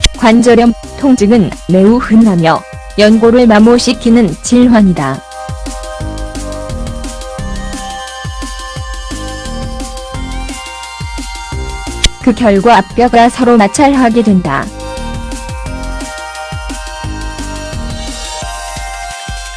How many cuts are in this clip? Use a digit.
0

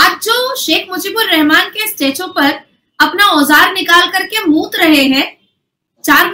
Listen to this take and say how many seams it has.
0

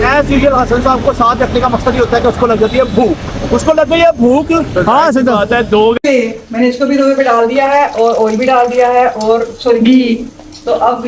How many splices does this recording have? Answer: 1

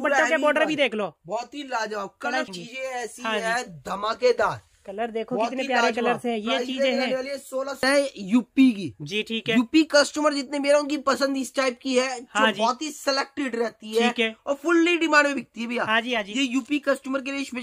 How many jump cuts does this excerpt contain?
2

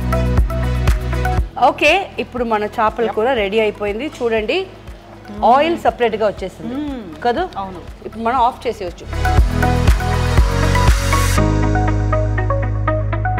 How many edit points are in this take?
1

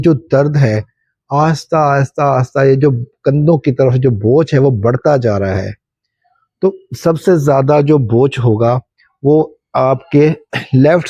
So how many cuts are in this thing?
0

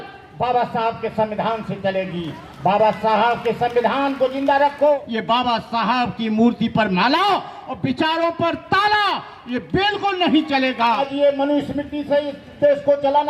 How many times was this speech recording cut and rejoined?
2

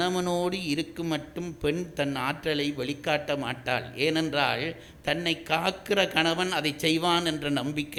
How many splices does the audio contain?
0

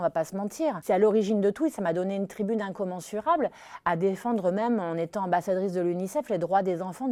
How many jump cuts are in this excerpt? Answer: 0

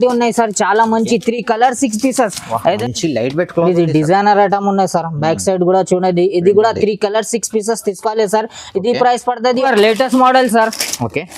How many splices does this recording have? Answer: 2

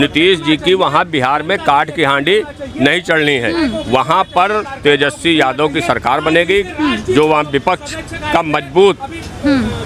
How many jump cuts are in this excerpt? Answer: 0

